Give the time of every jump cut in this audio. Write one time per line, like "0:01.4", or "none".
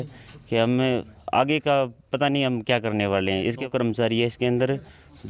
0:03.6